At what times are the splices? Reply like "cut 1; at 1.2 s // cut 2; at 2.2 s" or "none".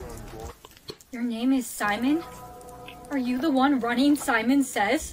none

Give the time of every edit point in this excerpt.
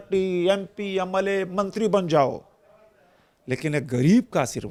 none

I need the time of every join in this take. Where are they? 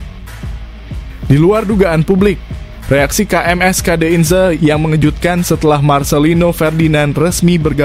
cut 1; at 1.3 s

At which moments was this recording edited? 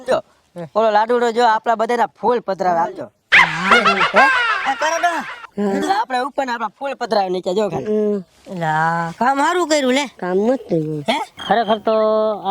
cut 1; at 11.3 s

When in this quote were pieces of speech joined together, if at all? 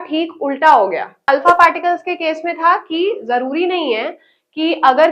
cut 1; at 1.3 s

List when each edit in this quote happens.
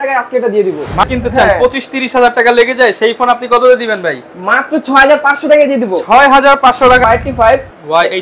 cut 1; at 1.0 s // cut 2; at 7.0 s

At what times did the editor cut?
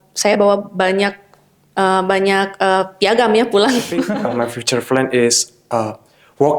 cut 1; at 4.1 s

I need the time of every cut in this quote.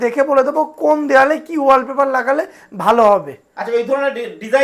none

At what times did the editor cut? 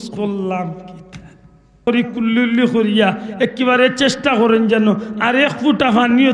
cut 1; at 1.8 s

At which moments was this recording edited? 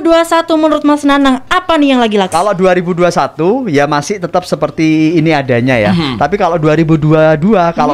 cut 1; at 2.3 s

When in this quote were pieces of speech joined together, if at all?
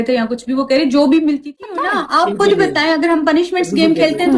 cut 1; at 1.6 s

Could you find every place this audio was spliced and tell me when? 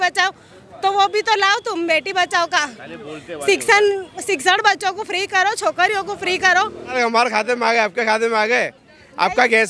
cut 1; at 6.9 s

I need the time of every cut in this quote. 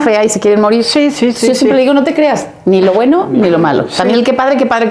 none

